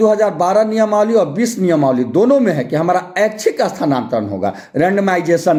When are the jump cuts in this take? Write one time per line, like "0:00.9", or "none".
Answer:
none